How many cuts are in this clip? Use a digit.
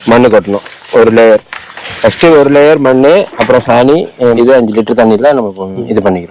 1